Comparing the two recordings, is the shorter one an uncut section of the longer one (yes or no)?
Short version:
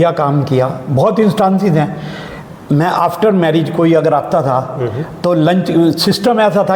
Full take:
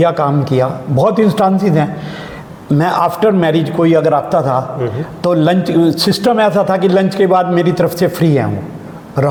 yes